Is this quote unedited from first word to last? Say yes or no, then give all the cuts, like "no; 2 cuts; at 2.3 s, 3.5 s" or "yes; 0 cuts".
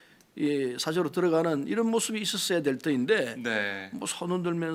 yes; 0 cuts